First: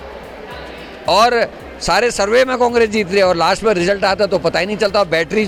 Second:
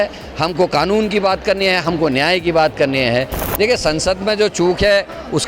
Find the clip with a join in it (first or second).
second